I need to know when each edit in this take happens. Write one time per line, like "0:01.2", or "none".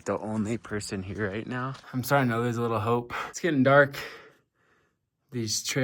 0:01.8